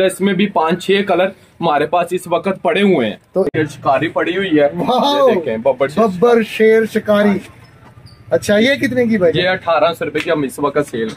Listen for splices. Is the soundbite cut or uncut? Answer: cut